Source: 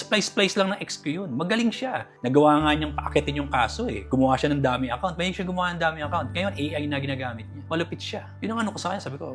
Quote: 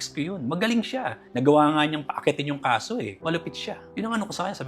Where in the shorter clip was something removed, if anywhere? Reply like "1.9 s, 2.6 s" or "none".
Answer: 3.1 s